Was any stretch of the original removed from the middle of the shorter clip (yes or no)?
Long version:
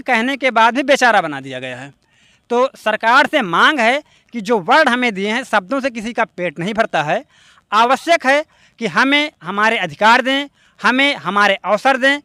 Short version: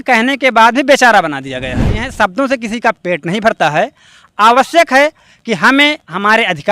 yes